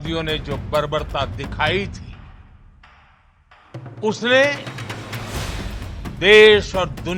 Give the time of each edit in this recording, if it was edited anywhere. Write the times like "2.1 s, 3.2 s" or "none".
none